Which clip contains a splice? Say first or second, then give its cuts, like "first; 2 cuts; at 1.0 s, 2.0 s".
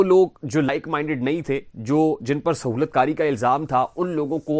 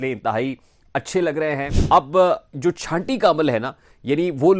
second; 1 cut; at 1.7 s